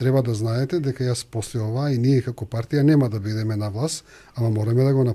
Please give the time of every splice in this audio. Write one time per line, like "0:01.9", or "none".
none

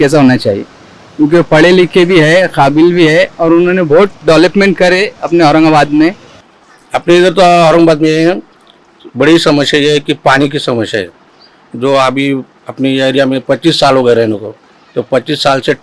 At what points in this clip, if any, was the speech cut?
none

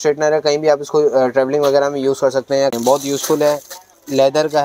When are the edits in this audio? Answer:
0:02.7

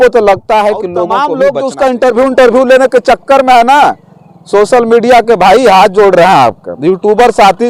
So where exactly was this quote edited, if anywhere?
0:01.1

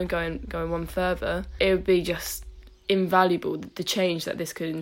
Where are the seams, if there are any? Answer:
0:01.5
0:03.7

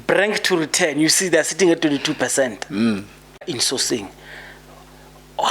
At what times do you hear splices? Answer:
0:03.6

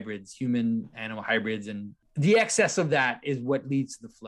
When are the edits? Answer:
0:02.0

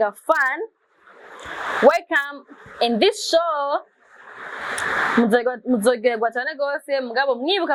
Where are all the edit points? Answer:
none

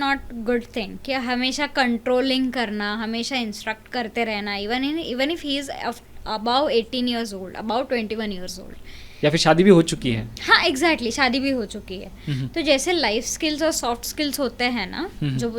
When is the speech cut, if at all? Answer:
none

